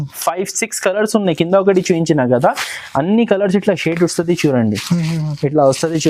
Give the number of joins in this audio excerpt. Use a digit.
0